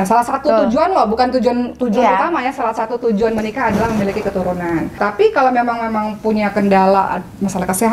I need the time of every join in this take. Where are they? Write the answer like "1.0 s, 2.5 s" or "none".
none